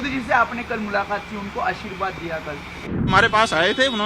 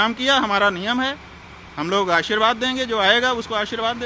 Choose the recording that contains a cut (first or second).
first